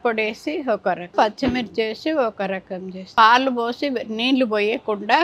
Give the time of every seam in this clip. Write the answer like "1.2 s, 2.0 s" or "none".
1.1 s, 3.2 s